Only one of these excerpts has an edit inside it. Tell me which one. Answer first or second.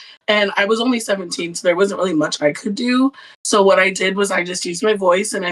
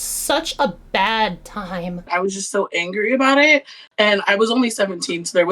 second